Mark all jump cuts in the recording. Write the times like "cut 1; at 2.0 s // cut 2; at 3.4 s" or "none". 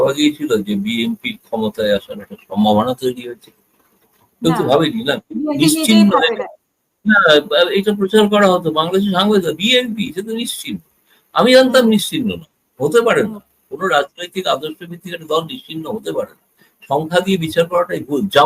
none

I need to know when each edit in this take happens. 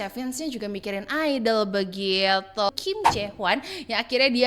cut 1; at 2.7 s

